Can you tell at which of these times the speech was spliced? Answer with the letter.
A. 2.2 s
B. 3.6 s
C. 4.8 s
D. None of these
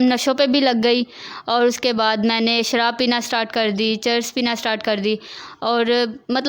D